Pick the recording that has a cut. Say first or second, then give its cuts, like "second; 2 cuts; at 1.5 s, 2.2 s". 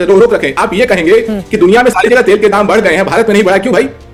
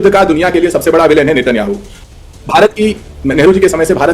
second; 1 cut; at 1.9 s